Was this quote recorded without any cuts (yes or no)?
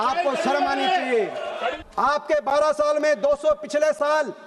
no